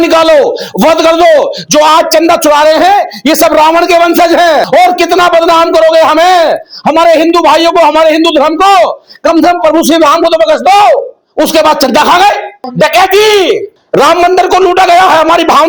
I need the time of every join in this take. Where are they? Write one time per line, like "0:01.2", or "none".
0:04.7
0:11.2
0:12.7
0:13.7